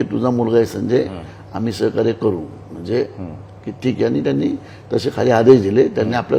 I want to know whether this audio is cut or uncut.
uncut